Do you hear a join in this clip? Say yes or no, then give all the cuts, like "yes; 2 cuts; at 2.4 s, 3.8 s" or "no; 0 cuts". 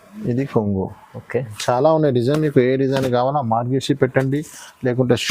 yes; 1 cut; at 1.5 s